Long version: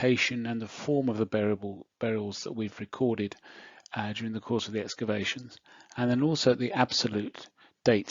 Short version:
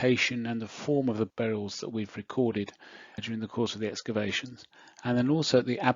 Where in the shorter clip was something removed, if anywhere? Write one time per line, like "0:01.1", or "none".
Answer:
0:01.3
0:03.2